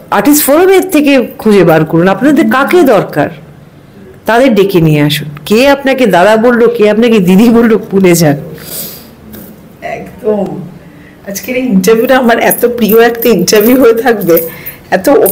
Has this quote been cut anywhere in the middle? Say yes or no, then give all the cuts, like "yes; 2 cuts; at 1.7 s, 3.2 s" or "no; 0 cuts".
no; 0 cuts